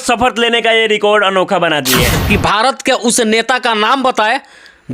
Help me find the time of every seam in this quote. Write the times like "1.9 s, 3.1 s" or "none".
2.1 s

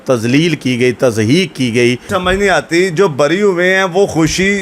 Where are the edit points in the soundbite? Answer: 2.1 s

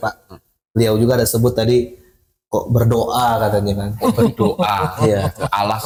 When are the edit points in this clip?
none

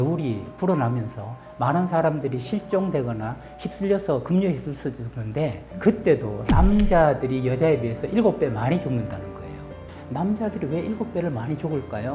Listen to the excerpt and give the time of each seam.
6.4 s, 9.7 s

